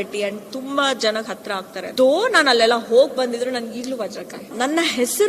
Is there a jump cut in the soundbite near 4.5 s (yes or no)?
yes